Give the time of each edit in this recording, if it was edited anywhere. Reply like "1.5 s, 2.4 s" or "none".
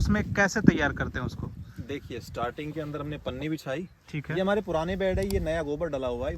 none